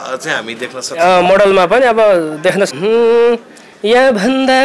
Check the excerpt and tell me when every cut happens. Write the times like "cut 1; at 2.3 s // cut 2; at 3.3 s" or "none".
cut 1; at 2.7 s